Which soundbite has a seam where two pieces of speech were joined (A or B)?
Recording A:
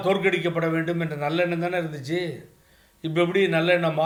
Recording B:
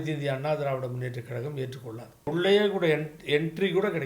B